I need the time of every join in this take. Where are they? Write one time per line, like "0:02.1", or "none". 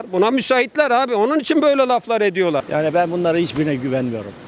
0:02.6